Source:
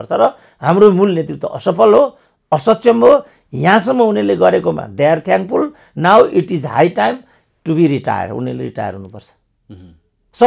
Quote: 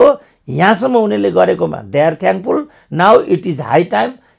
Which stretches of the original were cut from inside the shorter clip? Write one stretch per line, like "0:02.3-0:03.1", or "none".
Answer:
none